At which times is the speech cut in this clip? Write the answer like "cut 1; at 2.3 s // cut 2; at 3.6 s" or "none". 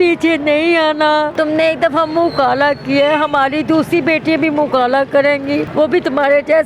cut 1; at 1.3 s // cut 2; at 5.7 s